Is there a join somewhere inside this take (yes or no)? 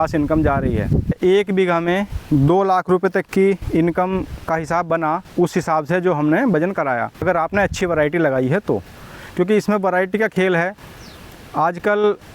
yes